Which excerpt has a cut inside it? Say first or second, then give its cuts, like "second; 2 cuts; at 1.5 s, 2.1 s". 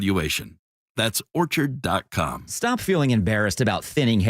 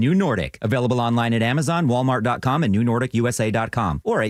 first; 1 cut; at 2.4 s